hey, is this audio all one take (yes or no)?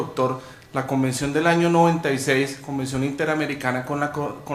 no